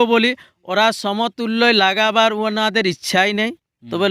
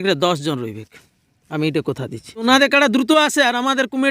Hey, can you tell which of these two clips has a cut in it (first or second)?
second